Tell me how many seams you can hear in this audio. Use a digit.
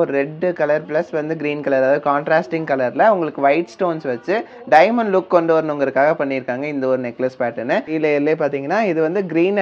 1